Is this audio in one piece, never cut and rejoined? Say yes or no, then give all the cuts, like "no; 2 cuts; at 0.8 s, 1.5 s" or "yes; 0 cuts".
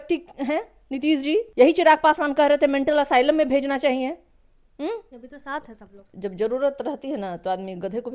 no; 2 cuts; at 1.5 s, 6.1 s